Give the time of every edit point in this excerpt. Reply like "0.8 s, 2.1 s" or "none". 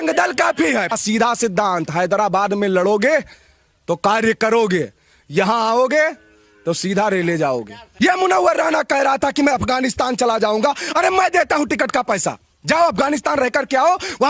0.9 s, 7.8 s